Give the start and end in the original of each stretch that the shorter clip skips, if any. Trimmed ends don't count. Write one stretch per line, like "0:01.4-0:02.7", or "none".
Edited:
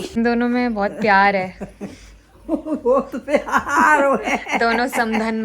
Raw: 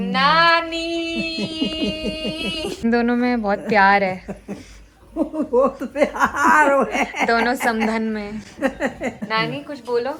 none